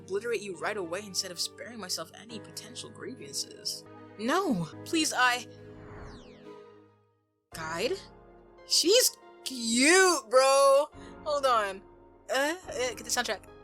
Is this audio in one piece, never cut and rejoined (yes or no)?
no